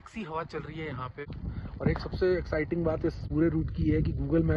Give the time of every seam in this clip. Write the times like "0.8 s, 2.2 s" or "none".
1.3 s, 3.2 s